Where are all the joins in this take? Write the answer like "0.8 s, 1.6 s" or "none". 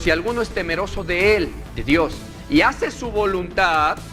1.7 s